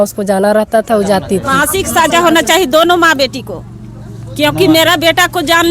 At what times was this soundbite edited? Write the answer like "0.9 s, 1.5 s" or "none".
1.5 s